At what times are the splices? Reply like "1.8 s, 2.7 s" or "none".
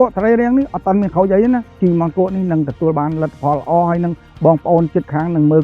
1.7 s